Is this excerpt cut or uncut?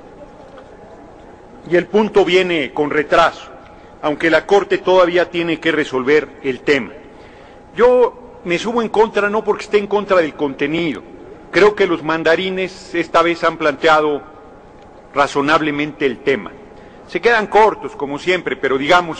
cut